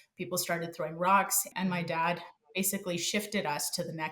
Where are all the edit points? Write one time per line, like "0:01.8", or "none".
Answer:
0:01.4